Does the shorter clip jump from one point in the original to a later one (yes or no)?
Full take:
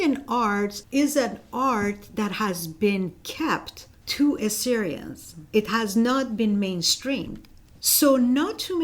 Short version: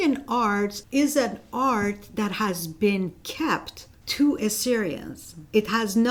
no